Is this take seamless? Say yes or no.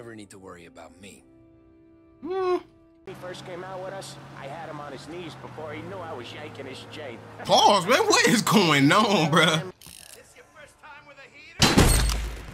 no